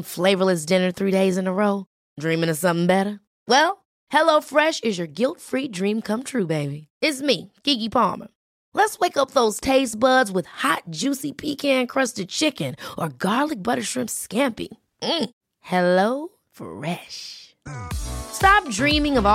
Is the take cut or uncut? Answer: uncut